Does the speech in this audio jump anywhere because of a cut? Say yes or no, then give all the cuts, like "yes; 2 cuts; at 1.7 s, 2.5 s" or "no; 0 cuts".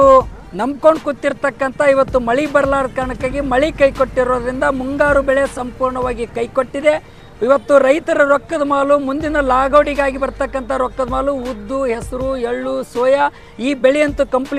no; 0 cuts